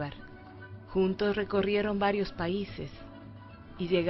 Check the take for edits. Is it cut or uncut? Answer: uncut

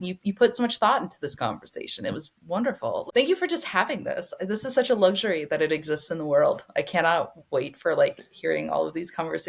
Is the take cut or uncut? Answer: cut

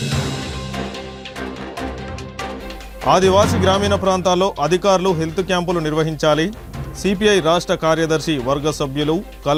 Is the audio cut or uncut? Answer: uncut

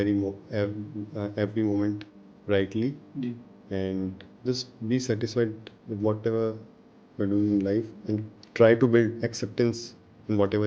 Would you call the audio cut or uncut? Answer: cut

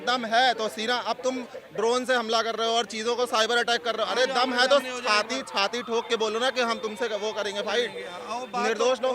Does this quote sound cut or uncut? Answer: uncut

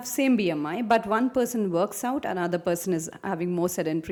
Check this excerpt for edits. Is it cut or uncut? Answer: uncut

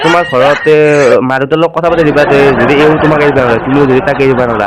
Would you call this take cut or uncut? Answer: uncut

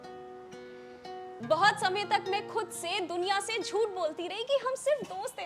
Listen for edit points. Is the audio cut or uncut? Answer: cut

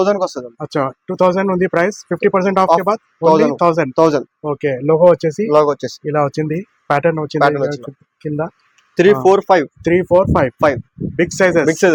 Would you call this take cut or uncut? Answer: uncut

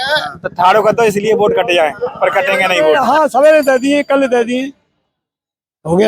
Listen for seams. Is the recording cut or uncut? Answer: cut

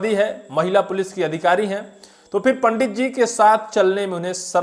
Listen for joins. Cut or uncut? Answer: uncut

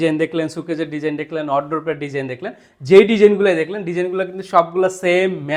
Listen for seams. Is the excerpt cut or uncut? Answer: uncut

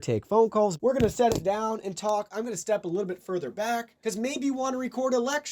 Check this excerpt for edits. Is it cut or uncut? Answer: cut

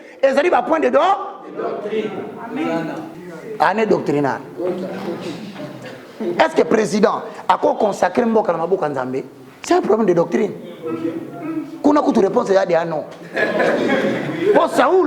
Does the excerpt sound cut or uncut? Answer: cut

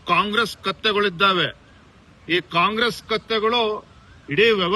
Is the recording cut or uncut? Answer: uncut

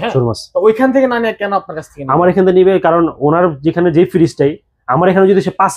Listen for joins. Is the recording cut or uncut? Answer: uncut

